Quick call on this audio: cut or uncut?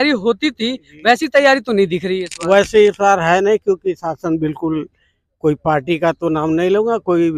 uncut